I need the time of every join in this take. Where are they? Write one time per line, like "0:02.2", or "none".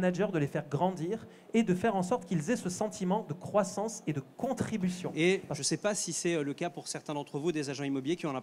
0:05.0